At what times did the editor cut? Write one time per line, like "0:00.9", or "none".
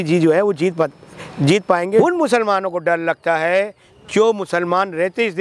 0:02.0